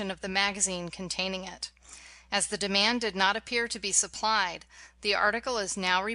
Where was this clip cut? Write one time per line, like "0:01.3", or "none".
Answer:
none